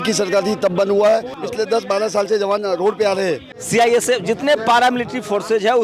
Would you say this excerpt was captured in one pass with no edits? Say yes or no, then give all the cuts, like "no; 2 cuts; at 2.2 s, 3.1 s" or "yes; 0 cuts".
no; 2 cuts; at 1.4 s, 3.5 s